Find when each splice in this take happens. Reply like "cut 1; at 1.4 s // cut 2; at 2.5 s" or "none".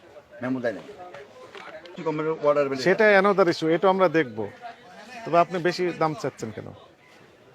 cut 1; at 1.9 s